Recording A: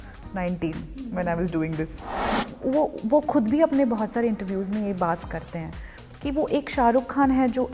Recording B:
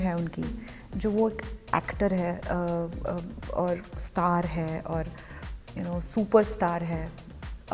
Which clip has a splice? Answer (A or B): A